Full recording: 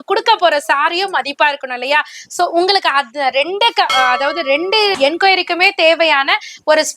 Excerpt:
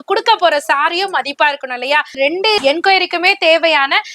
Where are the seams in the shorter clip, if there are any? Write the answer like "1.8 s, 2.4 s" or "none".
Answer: 2.5 s